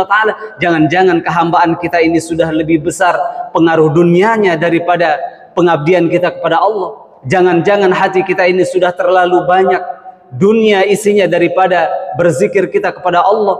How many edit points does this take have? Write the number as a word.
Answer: zero